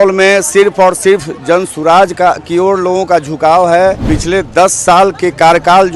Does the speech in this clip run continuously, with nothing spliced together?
no; 1 cut; at 4.0 s

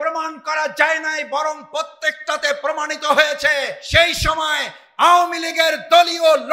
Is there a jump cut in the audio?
yes; 1 cut; at 3.8 s

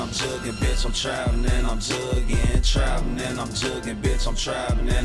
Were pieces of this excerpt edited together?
no; 0 cuts

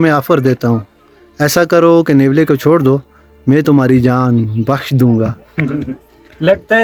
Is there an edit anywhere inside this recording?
no; 0 cuts

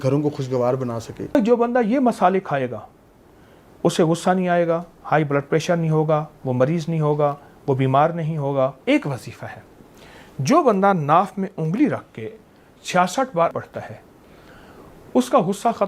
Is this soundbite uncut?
no; 3 cuts; at 1.3 s, 8.8 s, 13.5 s

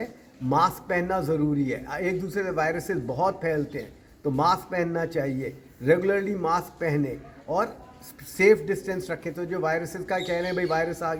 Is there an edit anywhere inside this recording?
no; 0 cuts

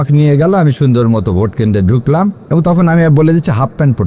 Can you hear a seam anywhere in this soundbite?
no; 0 cuts

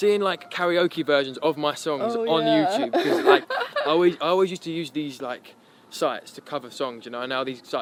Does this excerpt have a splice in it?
no; 0 cuts

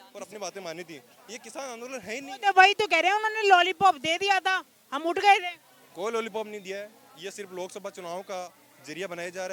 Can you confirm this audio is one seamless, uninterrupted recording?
yes; 0 cuts

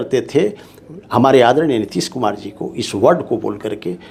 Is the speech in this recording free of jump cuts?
yes; 0 cuts

